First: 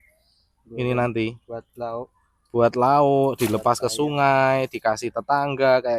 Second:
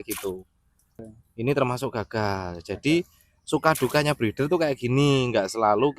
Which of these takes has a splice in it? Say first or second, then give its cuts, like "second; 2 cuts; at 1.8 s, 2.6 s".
second; 1 cut; at 1.0 s